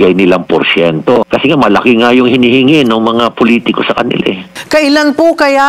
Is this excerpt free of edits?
no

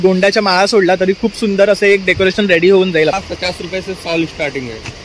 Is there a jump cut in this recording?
yes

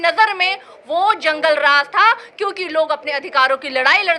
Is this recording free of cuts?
yes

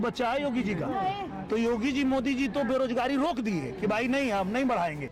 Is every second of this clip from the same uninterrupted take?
yes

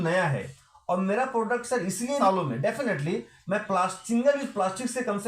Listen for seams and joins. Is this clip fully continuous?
no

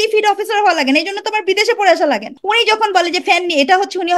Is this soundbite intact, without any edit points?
no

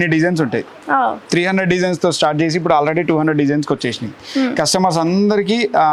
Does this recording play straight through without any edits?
yes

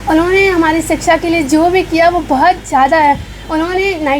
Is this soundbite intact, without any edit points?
yes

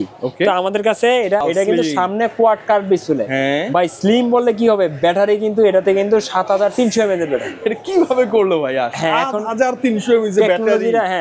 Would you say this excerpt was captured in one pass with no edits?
no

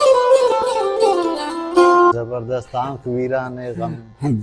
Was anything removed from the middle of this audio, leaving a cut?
yes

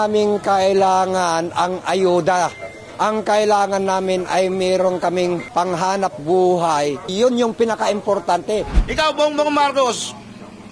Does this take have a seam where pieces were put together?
yes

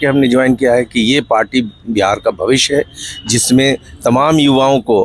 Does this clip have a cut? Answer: no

